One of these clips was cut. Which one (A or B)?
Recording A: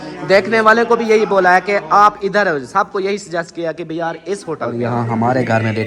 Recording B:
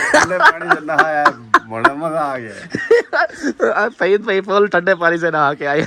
A